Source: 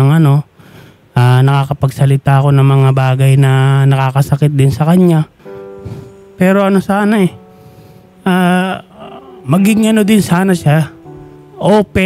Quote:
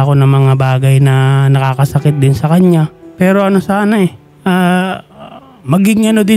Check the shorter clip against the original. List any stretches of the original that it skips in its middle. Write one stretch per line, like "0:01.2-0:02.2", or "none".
0:05.4-0:06.2
0:07.5-0:08.1